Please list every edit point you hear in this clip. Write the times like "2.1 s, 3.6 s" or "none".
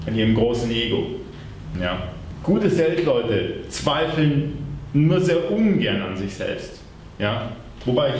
2.3 s